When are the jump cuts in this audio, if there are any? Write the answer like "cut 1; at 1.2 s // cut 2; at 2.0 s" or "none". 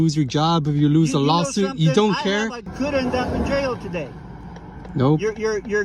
cut 1; at 2.7 s